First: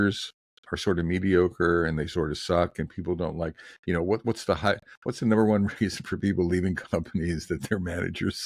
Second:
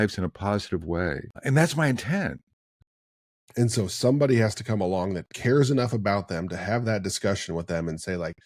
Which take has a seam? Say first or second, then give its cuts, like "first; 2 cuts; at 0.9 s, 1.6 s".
second; 2 cuts; at 1.3 s, 3.0 s